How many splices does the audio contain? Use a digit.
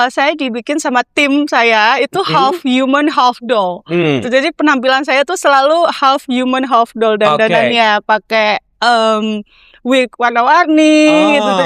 0